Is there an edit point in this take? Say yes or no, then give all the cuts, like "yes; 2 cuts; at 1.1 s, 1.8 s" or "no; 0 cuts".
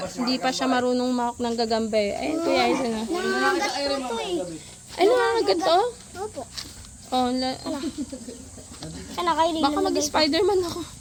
no; 0 cuts